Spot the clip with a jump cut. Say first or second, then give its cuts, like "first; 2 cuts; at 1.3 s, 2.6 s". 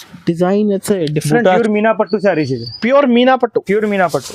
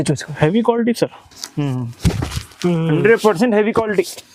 first; 1 cut; at 1.6 s